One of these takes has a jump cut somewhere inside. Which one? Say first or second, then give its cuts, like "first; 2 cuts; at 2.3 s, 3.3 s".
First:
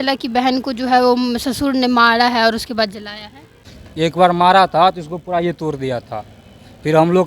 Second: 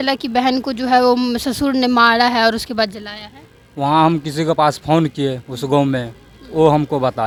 first; 1 cut; at 3.6 s